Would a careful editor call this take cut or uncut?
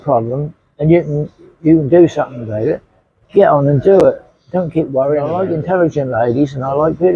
cut